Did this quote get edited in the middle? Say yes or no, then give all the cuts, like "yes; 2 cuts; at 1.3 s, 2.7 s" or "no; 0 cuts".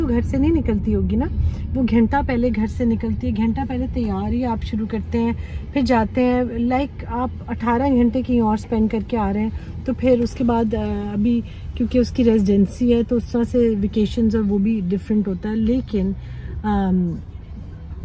no; 0 cuts